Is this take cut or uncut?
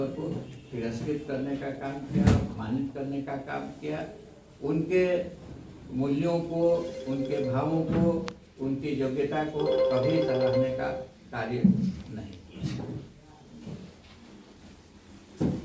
uncut